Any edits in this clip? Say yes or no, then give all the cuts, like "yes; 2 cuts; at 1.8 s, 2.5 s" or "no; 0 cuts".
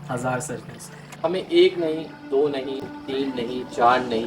no; 0 cuts